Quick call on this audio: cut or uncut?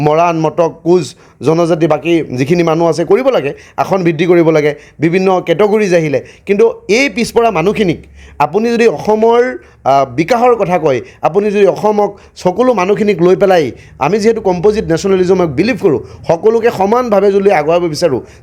uncut